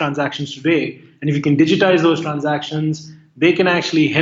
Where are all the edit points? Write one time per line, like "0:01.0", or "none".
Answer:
none